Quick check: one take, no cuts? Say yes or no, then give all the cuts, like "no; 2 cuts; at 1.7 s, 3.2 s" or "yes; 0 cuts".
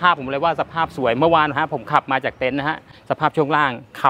no; 1 cut; at 2.9 s